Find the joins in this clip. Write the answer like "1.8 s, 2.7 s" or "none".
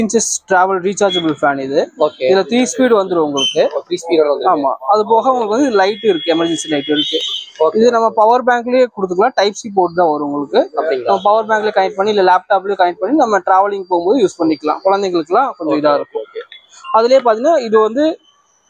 none